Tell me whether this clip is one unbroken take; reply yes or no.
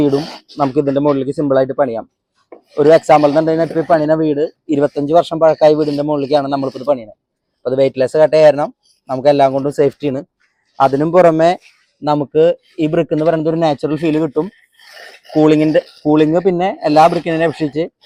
yes